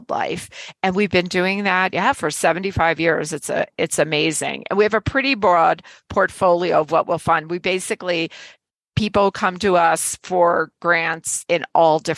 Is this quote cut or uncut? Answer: uncut